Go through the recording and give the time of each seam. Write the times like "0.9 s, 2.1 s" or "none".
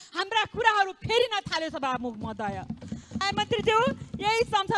3.2 s